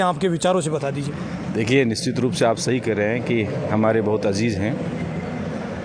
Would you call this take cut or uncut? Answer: uncut